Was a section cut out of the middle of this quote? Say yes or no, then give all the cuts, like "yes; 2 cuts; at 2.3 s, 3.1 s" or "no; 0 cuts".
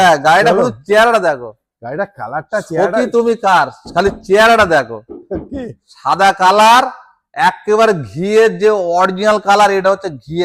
no; 0 cuts